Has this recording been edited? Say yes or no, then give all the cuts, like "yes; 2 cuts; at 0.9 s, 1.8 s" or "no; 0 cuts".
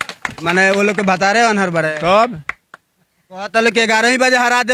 no; 0 cuts